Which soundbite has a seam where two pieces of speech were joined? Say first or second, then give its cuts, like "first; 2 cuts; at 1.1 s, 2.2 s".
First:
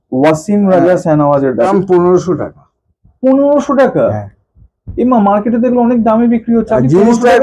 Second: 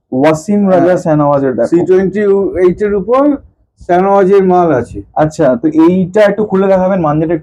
first; 1 cut; at 1.7 s